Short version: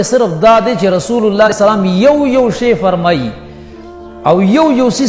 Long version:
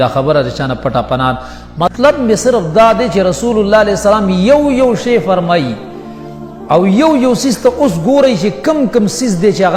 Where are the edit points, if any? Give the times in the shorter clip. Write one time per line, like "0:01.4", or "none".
0:01.5